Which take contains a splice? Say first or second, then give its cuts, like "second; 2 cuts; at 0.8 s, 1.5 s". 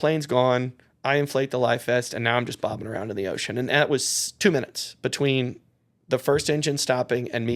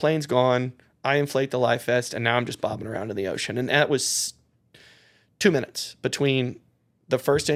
first; 1 cut; at 4.2 s